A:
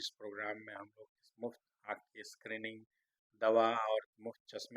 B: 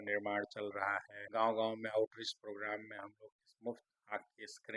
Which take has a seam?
B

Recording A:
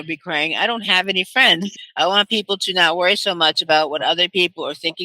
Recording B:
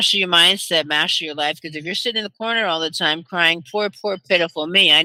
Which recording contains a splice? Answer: A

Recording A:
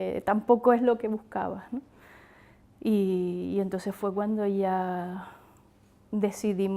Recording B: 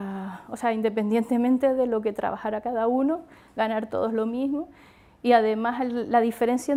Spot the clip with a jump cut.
A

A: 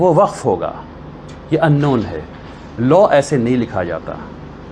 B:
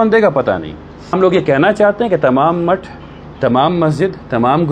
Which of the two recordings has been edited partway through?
B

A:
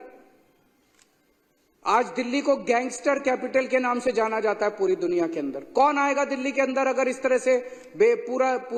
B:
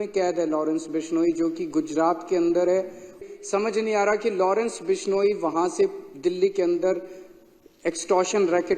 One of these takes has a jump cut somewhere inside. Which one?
B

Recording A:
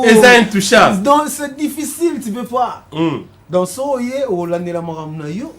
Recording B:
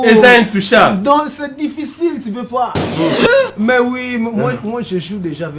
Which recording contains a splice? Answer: B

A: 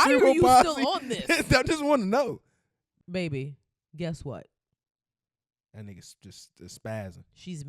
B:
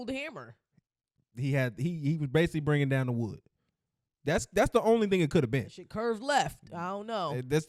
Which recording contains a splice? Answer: A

